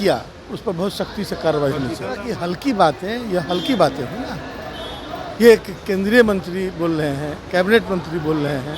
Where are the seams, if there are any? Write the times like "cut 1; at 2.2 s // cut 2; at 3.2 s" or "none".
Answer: cut 1; at 2.4 s

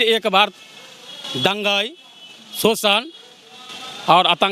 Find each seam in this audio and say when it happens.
none

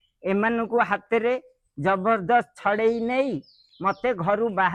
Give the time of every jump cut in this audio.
none

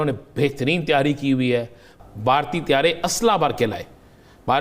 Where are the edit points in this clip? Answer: cut 1; at 1.9 s

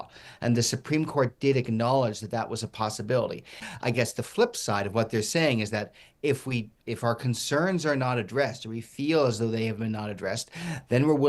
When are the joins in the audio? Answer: cut 1; at 3.6 s

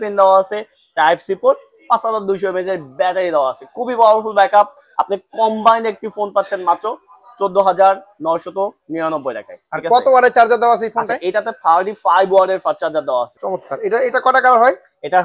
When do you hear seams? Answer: cut 1; at 13.4 s

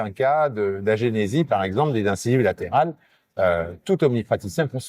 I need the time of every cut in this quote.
none

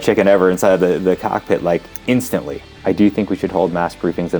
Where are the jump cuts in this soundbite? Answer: cut 1; at 2.6 s

